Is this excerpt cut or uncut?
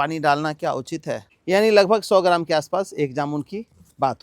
cut